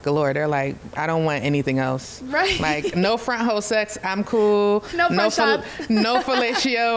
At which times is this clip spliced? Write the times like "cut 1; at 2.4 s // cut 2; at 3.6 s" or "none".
none